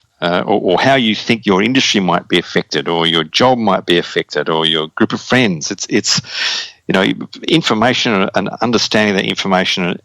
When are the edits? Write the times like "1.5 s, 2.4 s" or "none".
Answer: 1.4 s

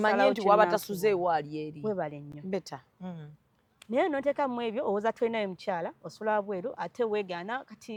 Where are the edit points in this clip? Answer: none

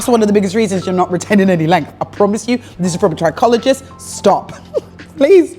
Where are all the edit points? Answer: none

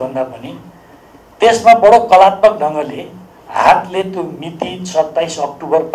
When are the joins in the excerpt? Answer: none

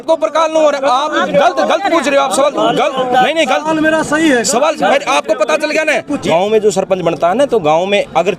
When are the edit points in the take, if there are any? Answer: 6.2 s

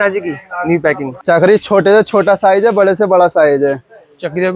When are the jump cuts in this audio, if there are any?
1.1 s

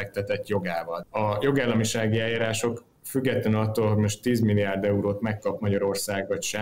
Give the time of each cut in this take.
1.0 s

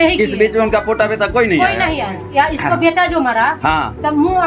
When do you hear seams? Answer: 2.4 s

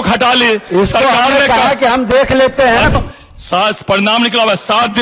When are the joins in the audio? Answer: 2.9 s

